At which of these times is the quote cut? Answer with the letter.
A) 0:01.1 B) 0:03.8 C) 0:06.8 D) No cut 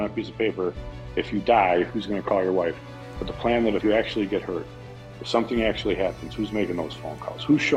B